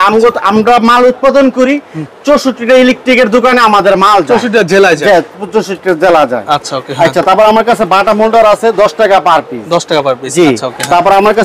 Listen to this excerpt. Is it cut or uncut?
uncut